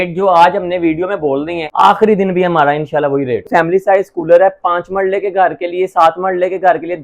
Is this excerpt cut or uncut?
cut